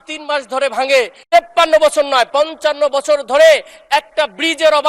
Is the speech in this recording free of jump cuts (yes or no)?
no